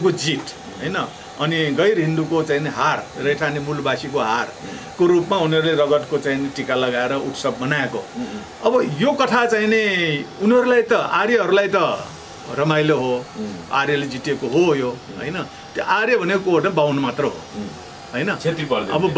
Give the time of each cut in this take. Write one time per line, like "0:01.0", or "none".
none